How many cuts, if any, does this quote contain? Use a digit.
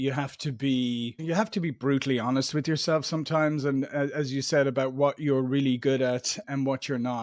0